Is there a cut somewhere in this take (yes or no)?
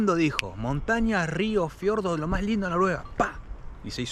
no